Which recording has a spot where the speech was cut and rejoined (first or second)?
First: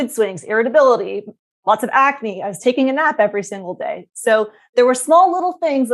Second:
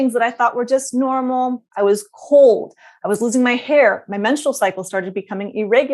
second